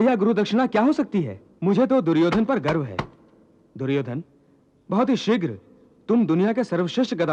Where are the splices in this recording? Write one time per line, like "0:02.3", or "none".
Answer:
0:01.4